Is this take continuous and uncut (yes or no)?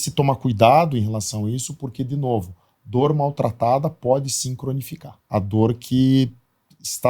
no